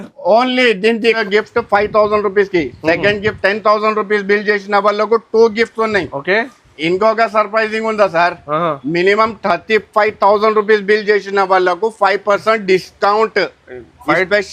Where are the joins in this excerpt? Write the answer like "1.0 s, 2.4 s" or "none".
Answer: 1.2 s